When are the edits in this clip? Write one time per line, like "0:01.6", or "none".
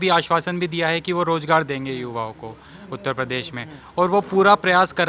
none